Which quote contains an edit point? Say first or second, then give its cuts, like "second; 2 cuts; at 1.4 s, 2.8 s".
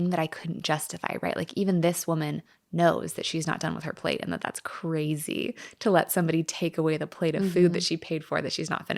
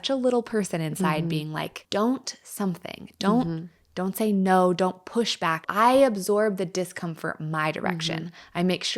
second; 2 cuts; at 1.8 s, 5.7 s